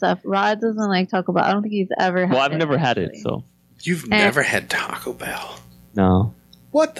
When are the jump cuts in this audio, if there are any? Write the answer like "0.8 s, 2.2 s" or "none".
none

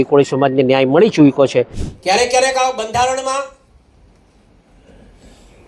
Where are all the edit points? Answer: 1.8 s

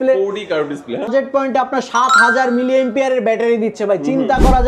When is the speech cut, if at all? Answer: 1.1 s

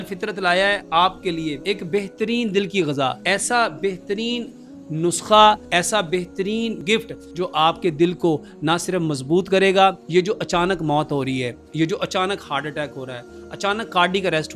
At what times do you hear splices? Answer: 1.6 s, 3.2 s, 6.8 s, 10.0 s

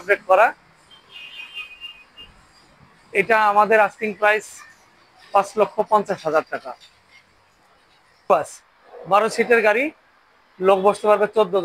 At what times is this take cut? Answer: 8.3 s

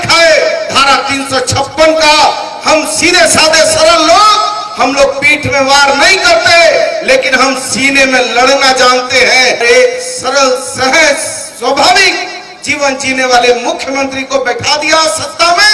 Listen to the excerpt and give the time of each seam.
9.6 s

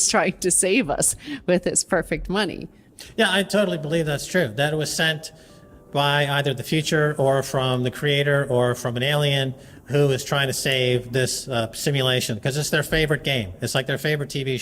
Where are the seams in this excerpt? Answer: none

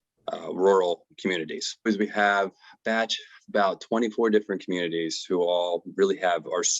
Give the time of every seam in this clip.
1.9 s

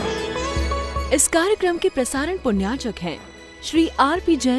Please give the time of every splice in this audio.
1.0 s

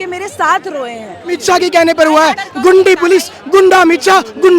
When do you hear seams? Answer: 1.4 s

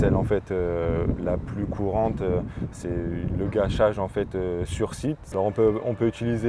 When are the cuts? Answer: 5.2 s

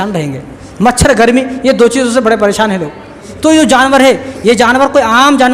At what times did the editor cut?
3.3 s

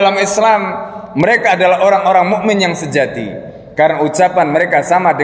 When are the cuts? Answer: none

